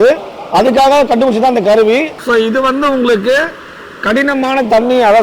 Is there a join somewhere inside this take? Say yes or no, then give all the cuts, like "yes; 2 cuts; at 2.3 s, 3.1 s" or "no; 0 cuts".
yes; 1 cut; at 2.2 s